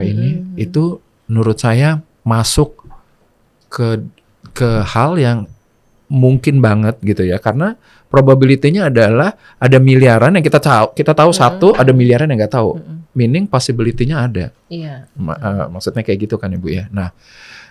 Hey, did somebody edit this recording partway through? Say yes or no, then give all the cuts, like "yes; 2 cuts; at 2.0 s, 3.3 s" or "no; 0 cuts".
no; 0 cuts